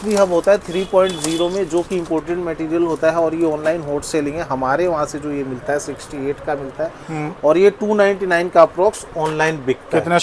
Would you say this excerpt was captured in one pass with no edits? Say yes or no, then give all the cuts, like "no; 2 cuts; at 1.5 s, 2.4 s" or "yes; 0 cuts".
yes; 0 cuts